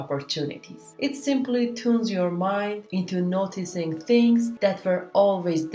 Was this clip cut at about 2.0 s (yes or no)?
no